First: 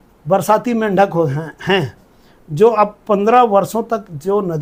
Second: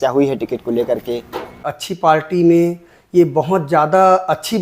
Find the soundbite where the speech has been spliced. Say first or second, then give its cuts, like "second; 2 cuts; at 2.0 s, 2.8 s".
second; 1 cut; at 1.7 s